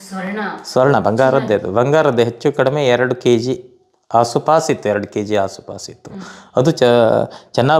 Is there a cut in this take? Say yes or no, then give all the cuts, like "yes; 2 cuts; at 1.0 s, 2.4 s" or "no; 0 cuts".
no; 0 cuts